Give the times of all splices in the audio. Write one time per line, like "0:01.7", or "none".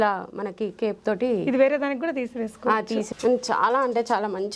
0:03.1